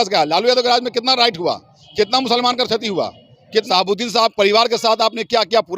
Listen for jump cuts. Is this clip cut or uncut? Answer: cut